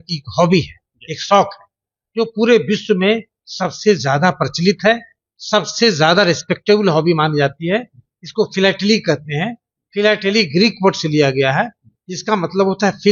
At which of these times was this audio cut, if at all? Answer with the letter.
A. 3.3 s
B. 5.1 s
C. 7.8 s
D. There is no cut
D